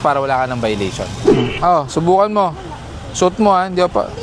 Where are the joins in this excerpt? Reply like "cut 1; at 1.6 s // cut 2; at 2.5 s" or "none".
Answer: cut 1; at 1.3 s